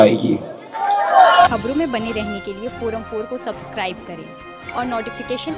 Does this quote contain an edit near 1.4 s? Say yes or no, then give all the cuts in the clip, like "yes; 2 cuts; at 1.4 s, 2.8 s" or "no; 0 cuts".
no; 0 cuts